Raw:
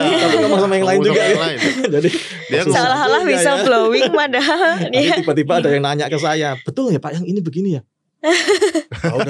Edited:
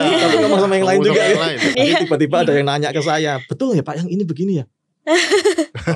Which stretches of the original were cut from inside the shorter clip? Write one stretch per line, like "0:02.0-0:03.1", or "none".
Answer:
0:01.7-0:04.9